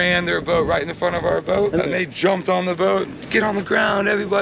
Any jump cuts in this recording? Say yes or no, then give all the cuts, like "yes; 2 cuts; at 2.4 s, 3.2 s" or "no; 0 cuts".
yes; 1 cut; at 1.8 s